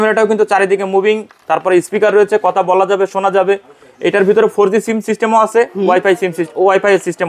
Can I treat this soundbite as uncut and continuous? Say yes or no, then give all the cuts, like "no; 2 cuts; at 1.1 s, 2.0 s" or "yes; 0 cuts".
yes; 0 cuts